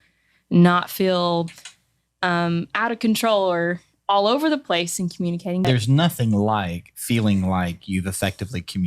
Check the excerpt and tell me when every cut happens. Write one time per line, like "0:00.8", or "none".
0:05.6